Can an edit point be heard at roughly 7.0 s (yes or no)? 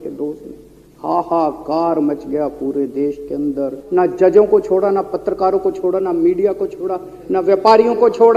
no